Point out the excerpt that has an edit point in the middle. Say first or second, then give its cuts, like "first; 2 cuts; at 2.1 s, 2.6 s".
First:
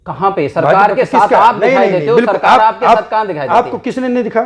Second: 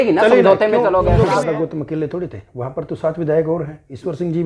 second; 1 cut; at 1.3 s